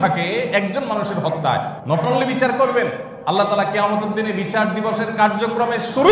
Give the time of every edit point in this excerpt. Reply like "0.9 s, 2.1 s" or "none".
1.8 s, 3.1 s